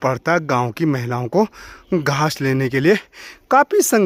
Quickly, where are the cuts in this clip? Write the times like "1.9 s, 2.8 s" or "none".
none